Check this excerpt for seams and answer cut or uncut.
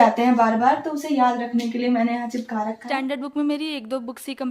cut